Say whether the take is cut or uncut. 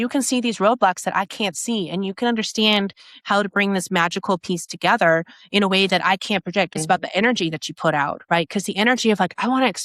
cut